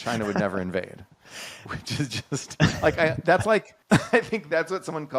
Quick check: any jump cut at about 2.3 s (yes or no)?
no